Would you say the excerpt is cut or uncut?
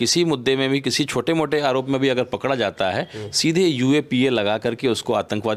uncut